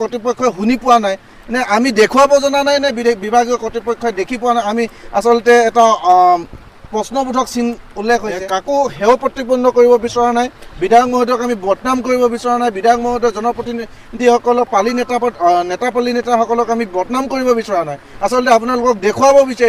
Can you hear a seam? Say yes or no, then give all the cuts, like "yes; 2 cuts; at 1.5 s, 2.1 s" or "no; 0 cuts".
no; 0 cuts